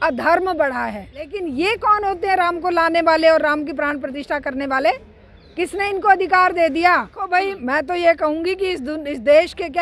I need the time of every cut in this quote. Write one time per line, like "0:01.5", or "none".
0:01.4
0:07.3